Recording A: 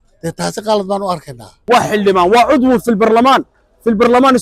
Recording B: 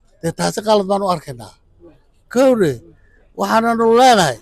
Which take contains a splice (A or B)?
A